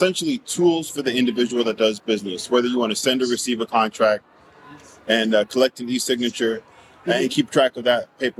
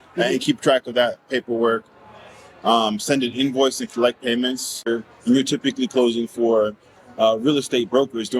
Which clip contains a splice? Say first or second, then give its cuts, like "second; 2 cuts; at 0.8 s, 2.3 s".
second; 1 cut; at 4.9 s